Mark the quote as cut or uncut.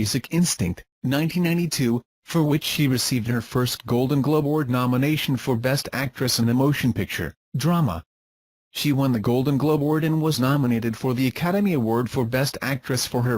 cut